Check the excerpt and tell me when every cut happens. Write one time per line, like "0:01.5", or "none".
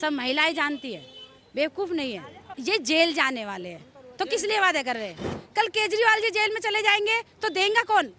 0:02.5
0:05.4